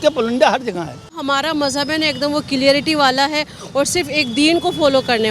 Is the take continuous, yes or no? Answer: no